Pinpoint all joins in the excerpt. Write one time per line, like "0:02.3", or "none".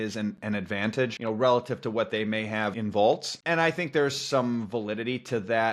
0:01.2
0:02.8
0:03.3

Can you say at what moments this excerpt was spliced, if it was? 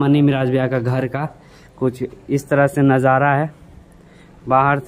none

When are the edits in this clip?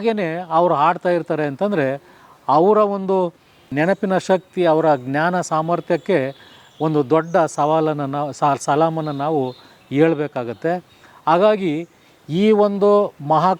none

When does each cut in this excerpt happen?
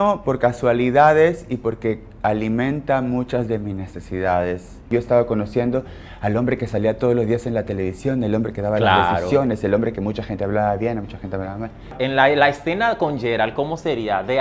0:04.9
0:11.9

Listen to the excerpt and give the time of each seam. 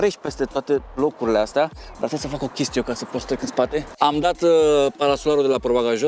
none

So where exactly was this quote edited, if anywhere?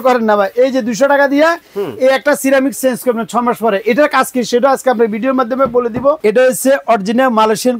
0:06.2

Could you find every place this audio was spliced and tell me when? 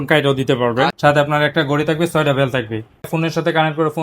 0:00.9
0:03.1

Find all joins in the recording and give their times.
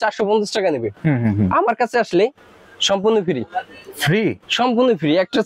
none

